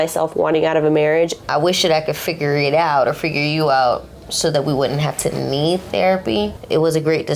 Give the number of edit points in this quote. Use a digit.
2